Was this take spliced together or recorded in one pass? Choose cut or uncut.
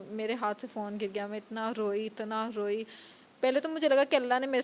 uncut